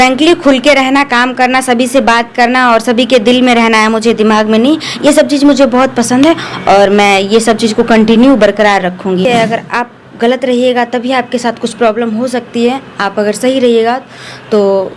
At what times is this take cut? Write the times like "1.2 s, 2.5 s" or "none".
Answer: 9.2 s